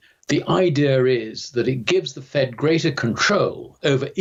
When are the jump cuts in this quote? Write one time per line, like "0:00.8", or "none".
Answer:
none